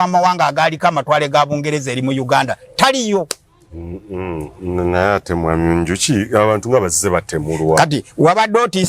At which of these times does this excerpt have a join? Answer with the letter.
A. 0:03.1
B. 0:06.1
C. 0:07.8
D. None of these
D